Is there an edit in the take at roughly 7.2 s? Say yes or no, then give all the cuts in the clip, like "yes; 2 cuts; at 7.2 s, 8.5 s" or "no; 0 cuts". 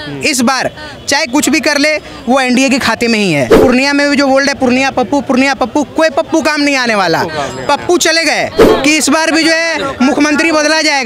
no; 2 cuts; at 3.6 s, 8.6 s